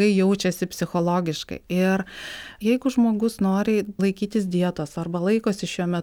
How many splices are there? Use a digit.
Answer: 2